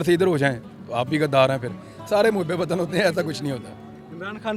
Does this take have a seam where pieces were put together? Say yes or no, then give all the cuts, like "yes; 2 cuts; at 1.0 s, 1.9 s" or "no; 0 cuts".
no; 0 cuts